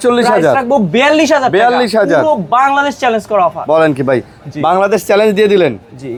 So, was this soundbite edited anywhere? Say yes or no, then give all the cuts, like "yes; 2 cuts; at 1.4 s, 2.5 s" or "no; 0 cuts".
no; 0 cuts